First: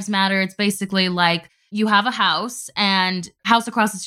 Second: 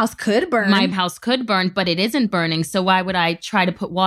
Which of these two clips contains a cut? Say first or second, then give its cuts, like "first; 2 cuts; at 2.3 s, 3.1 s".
first; 2 cuts; at 1.6 s, 2.9 s